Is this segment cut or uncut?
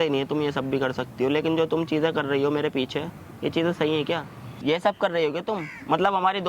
cut